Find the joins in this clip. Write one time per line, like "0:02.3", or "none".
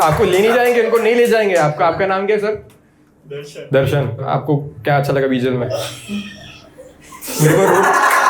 0:04.3